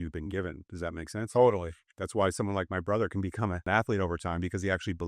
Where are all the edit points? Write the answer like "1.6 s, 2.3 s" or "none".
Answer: 3.6 s